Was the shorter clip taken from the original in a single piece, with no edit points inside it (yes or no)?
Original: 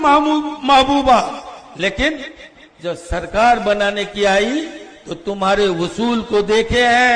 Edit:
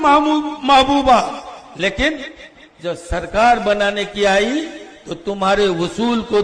yes